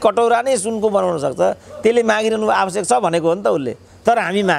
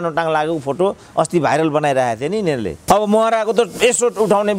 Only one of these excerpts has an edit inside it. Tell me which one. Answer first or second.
second